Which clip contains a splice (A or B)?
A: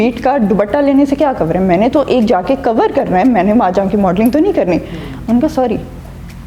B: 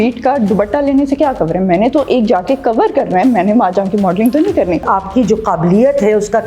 B